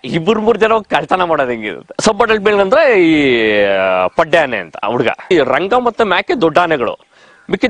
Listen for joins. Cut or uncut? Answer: cut